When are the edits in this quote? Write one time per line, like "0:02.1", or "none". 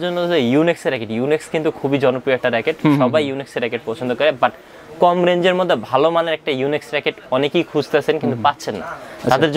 none